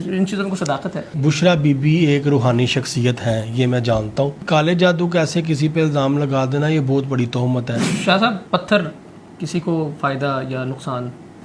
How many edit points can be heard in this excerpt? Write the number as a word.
three